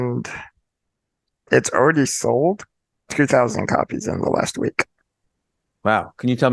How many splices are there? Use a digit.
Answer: 2